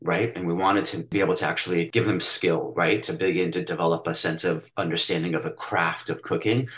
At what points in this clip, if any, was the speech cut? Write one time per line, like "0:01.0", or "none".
0:01.0
0:01.9